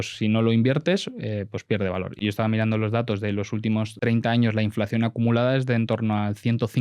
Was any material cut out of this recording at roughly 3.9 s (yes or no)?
yes